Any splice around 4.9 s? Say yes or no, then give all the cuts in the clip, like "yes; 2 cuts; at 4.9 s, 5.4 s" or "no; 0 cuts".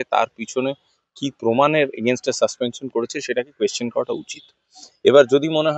no; 0 cuts